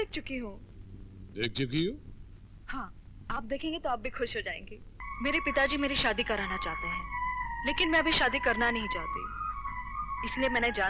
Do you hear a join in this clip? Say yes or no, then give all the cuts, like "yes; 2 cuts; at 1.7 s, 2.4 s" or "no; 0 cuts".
yes; 1 cut; at 5.0 s